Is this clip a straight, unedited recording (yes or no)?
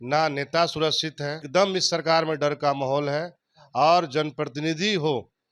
no